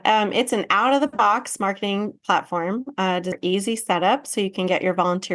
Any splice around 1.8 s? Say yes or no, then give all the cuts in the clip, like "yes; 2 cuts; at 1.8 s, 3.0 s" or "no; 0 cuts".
no; 1 cut; at 3.3 s